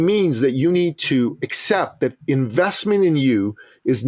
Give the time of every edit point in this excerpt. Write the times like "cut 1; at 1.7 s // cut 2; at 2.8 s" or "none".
none